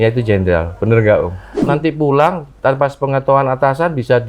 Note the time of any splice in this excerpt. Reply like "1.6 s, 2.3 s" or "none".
1.7 s